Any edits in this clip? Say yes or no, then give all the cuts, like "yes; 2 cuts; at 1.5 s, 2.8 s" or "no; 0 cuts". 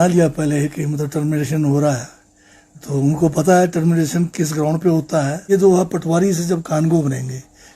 yes; 1 cut; at 5.4 s